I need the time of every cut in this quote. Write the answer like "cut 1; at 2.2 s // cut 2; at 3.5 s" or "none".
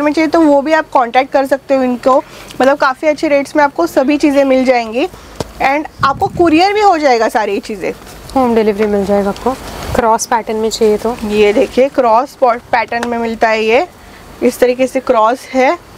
none